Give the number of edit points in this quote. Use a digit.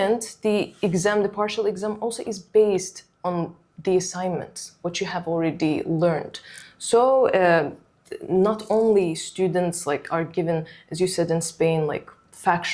0